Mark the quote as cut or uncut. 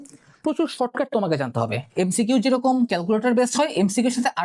uncut